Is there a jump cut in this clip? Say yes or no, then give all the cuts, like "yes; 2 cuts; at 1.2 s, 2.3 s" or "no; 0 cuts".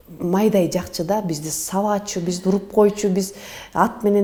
no; 0 cuts